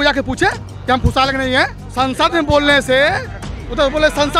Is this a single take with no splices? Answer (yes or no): yes